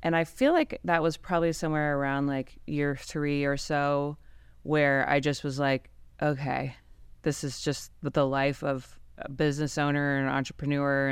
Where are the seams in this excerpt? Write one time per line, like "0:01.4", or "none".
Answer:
none